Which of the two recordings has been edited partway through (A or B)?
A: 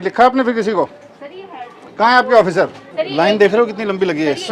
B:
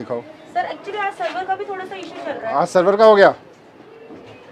A